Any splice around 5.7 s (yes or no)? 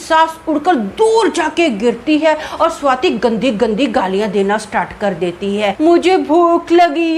yes